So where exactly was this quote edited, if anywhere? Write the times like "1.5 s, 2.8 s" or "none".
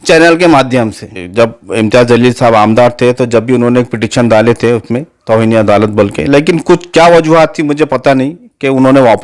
1.2 s

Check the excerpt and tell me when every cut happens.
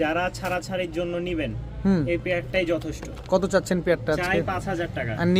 none

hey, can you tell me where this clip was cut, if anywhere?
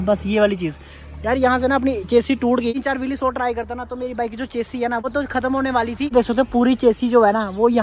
2.7 s, 6.1 s

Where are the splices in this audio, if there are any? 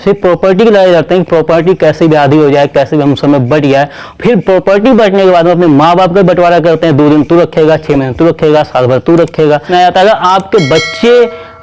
9.7 s

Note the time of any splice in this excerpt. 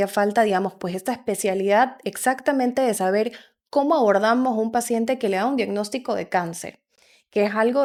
none

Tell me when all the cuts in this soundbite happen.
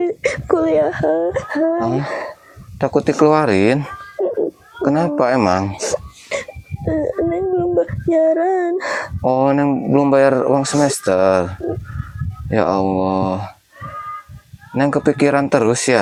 none

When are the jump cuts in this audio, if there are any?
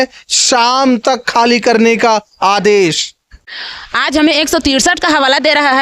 3.4 s

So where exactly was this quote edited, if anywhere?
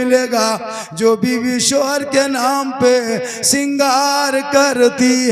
none

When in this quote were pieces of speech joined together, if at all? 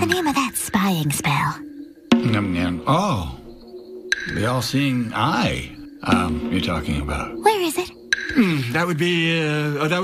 1.8 s

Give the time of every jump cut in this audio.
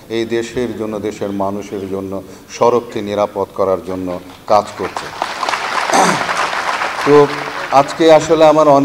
none

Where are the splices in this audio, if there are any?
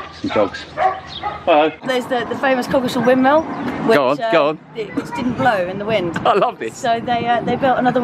1.8 s

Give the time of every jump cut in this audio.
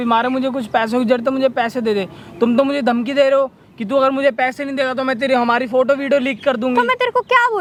none

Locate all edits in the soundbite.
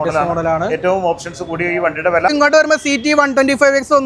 2.3 s

